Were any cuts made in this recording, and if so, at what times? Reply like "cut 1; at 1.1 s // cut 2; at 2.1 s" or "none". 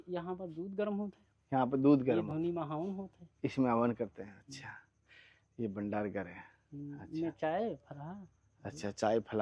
none